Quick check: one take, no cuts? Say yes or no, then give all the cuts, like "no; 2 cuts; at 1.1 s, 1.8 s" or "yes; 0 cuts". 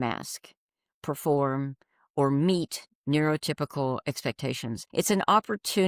no; 1 cut; at 4.8 s